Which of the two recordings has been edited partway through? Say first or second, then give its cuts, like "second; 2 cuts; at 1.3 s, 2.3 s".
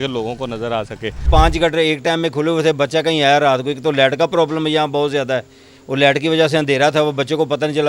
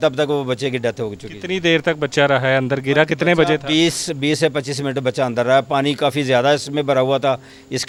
first; 1 cut; at 1.2 s